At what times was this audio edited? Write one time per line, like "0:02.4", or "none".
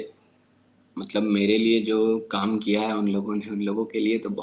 none